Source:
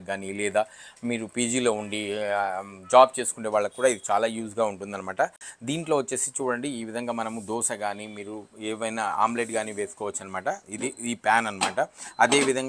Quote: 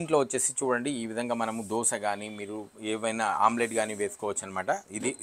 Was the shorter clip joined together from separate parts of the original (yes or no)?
no